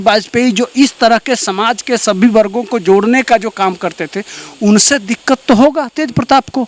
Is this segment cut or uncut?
uncut